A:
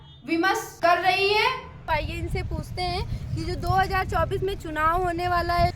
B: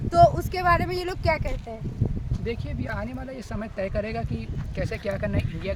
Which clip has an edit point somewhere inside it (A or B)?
A